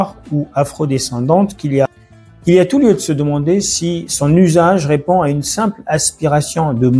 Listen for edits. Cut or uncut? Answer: uncut